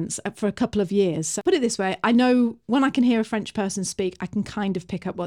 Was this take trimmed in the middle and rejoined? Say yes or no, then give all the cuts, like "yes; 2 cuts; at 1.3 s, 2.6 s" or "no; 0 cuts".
yes; 1 cut; at 1.3 s